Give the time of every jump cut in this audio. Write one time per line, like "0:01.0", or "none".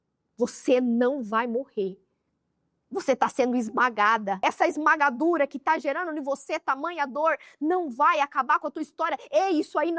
0:04.4

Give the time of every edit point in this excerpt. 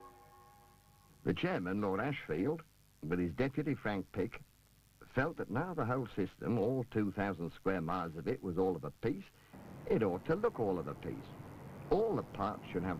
none

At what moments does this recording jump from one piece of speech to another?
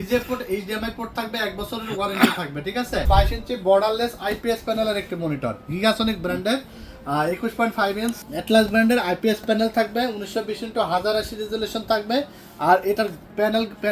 0:03.1
0:08.2

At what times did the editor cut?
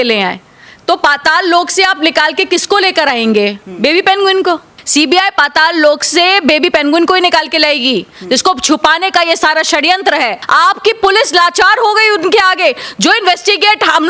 0:10.4

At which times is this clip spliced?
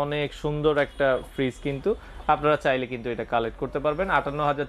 none

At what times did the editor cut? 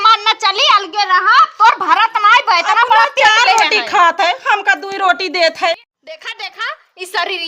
0:05.9

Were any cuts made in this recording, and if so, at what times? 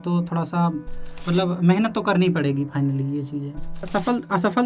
0:03.7

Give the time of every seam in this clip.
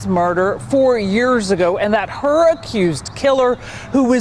0:02.7

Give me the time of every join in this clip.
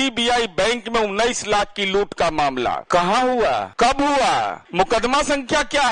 0:02.8
0:03.7
0:04.6

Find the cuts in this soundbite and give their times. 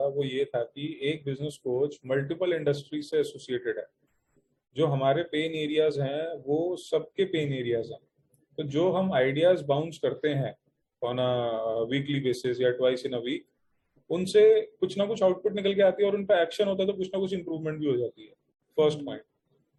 none

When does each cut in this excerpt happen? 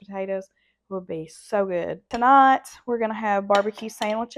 0:02.1

